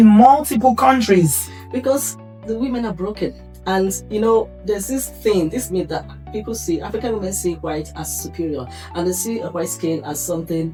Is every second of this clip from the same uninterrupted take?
yes; 0 cuts

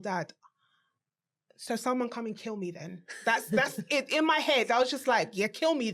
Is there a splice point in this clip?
no; 0 cuts

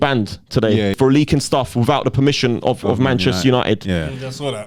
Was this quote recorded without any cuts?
no; 1 cut; at 1.0 s

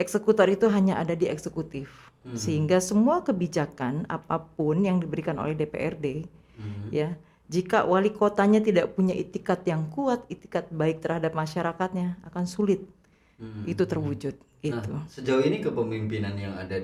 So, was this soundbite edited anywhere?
no; 0 cuts

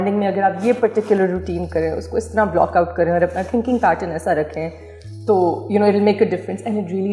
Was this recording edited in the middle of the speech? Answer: no; 0 cuts

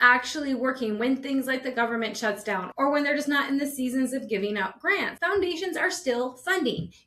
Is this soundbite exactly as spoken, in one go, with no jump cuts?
no; 1 cut; at 5.1 s

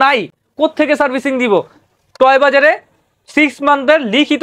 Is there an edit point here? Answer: no; 0 cuts

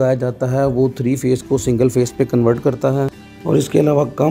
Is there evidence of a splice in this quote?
no; 0 cuts

